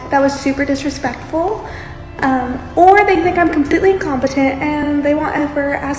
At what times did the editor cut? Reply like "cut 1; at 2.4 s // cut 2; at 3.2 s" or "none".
none